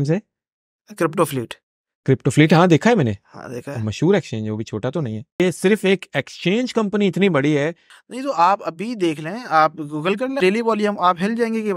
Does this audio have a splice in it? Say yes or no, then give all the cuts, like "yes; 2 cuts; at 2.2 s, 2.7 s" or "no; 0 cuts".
yes; 3 cuts; at 5.4 s, 7.9 s, 10.4 s